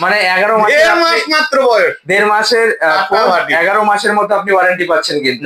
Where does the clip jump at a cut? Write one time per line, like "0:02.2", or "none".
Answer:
none